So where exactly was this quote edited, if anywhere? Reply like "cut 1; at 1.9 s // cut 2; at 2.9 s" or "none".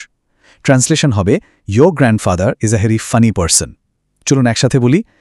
none